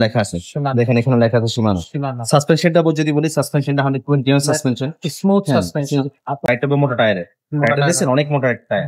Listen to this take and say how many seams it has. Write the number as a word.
one